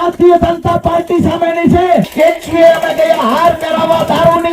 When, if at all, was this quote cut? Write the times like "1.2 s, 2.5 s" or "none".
2.1 s